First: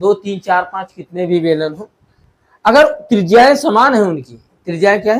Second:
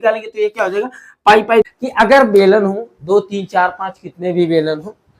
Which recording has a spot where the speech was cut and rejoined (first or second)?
second